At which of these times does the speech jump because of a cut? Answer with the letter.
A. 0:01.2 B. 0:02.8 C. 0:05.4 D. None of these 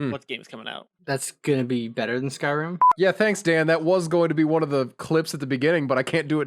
B